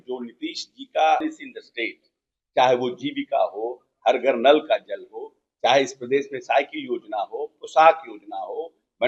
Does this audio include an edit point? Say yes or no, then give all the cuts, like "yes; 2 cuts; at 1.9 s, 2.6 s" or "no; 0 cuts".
yes; 1 cut; at 1.2 s